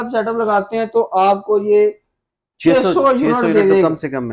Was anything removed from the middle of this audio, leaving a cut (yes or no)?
no